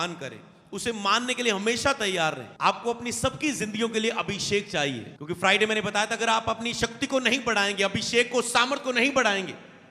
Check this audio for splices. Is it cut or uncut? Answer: cut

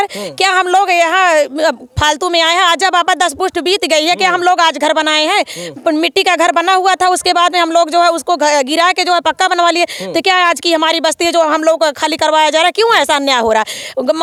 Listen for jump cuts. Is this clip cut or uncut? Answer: uncut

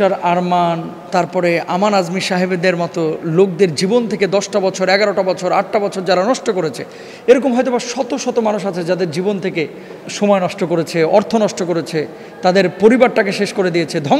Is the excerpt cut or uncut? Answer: uncut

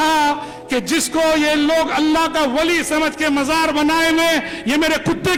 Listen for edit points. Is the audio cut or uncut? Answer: uncut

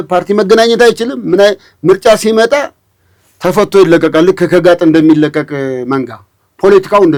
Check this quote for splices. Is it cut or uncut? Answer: uncut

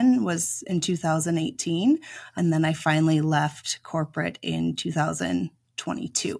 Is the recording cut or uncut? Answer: cut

